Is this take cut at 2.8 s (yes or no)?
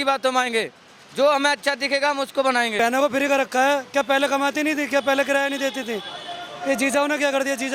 yes